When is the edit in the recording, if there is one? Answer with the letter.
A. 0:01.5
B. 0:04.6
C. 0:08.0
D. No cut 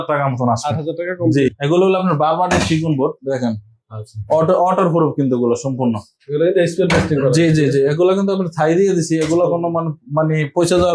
A